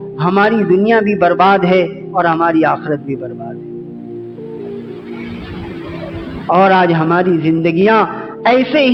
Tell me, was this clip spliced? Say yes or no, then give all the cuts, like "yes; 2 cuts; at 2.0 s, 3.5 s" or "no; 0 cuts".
no; 0 cuts